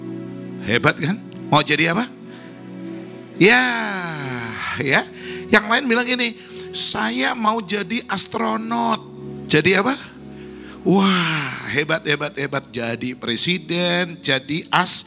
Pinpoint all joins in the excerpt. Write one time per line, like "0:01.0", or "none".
none